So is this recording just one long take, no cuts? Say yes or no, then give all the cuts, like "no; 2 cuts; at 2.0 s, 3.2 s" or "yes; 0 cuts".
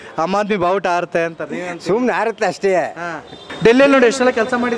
no; 1 cut; at 3.5 s